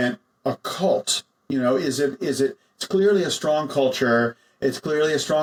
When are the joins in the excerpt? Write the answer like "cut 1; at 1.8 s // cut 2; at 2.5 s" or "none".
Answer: none